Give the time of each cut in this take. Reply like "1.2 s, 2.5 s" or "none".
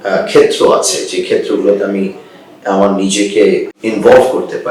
3.7 s

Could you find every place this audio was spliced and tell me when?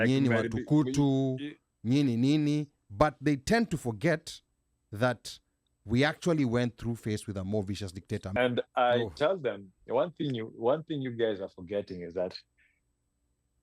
8.3 s

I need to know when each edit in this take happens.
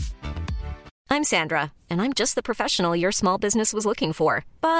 0.9 s

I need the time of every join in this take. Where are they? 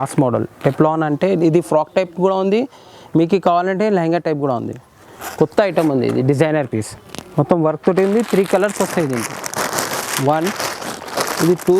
none

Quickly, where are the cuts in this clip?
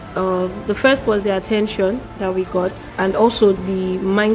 2.8 s

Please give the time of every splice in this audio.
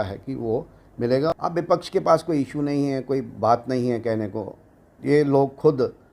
1.3 s

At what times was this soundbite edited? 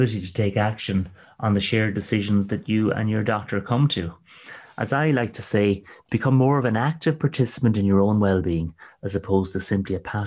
none

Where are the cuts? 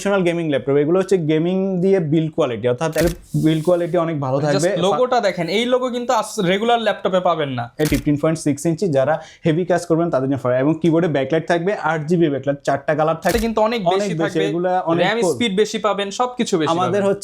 3.0 s, 7.9 s, 13.3 s

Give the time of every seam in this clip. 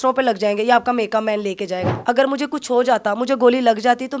1.9 s

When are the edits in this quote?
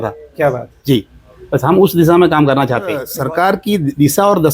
3.1 s

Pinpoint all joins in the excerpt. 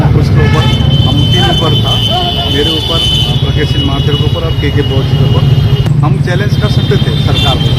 5.9 s

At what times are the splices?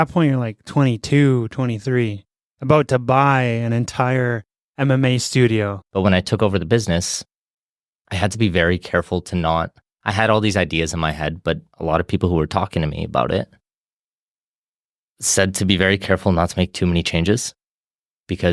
5.8 s

